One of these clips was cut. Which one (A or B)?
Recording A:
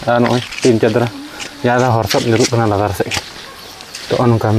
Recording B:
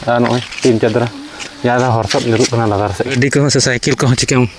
B